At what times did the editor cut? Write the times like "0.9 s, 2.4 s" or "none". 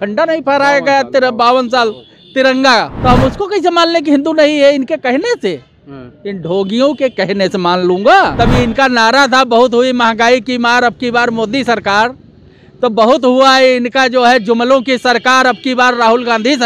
2.9 s, 8.3 s